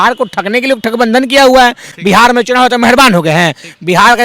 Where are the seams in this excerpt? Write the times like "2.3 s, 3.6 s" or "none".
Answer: 1.9 s